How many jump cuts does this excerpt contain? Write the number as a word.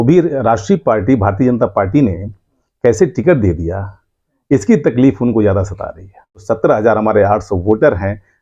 one